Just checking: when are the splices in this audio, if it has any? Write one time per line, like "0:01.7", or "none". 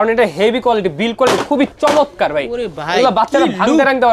0:01.7

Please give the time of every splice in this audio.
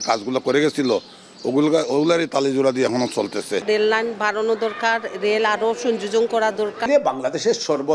0:03.6
0:06.9

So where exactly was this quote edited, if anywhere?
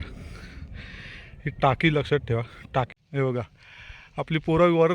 0:02.9

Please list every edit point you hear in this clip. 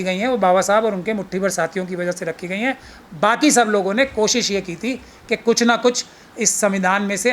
none

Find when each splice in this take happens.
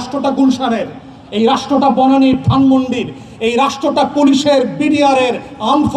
none

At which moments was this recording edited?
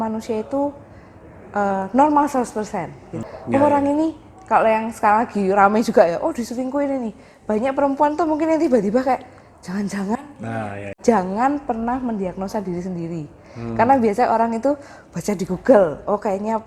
0:03.3
0:10.8

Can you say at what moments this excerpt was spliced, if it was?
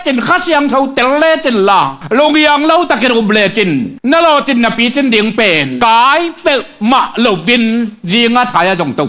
0:02.0
0:03.9
0:05.7

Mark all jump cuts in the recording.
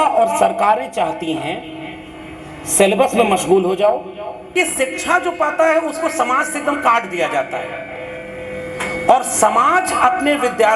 0:04.6

